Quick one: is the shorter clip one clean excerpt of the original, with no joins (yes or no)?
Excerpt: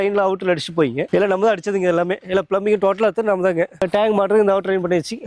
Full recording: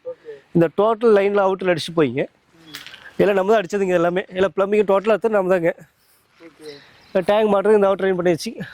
no